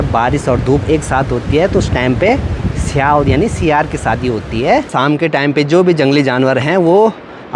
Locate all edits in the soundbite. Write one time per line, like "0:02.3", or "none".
0:04.9